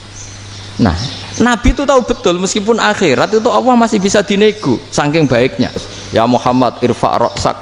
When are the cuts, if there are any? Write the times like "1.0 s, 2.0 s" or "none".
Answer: 6.0 s